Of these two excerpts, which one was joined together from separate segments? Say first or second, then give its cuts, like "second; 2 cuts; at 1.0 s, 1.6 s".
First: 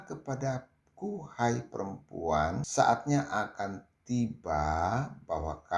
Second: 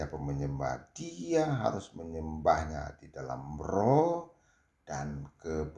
first; 1 cut; at 2.6 s